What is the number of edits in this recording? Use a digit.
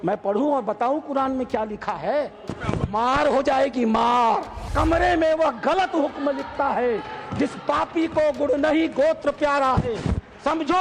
1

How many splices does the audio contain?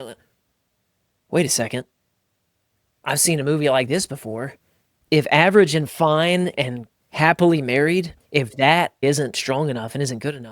3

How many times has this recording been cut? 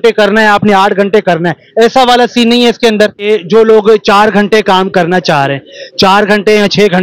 1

